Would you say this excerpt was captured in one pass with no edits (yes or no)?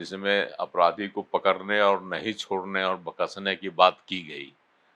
yes